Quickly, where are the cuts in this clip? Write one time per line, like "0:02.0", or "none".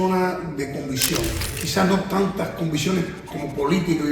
0:01.6